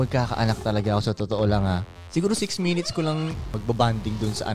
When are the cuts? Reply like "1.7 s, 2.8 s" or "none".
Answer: 3.5 s